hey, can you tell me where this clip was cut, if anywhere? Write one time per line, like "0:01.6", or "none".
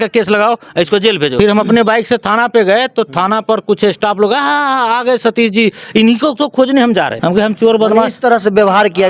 0:01.3